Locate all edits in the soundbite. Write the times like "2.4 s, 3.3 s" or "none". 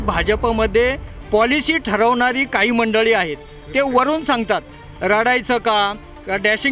none